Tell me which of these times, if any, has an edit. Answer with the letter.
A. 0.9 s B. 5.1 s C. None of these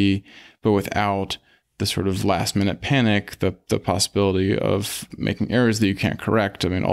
B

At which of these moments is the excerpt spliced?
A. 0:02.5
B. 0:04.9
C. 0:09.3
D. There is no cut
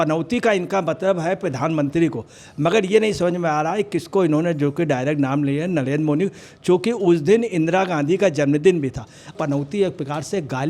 C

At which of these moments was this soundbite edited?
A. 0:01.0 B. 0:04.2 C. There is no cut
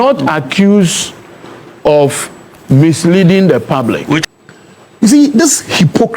B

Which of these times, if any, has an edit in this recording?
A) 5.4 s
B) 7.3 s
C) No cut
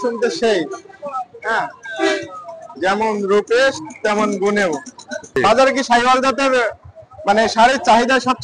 A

